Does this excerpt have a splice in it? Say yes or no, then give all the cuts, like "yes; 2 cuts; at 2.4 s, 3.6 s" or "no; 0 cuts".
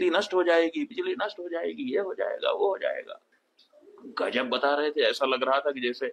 no; 0 cuts